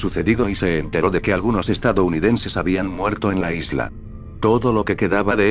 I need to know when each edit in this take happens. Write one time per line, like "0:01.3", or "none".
0:03.4